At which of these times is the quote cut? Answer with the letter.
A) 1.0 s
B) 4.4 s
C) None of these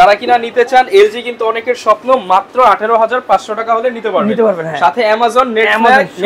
C